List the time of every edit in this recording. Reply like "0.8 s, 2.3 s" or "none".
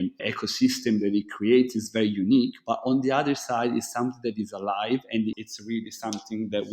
5.3 s